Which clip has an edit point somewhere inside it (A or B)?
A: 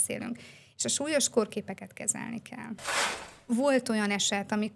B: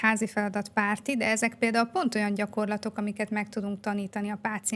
A